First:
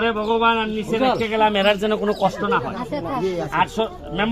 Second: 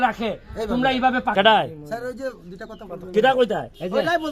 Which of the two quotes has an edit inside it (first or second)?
second